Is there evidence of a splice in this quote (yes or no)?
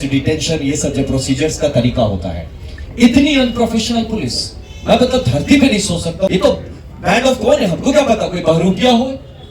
yes